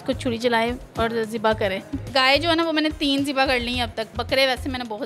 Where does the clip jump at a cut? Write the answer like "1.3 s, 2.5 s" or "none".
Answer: 2.1 s, 4.1 s